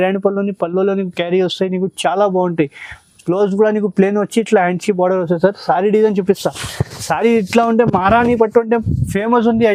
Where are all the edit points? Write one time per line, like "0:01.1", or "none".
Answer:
none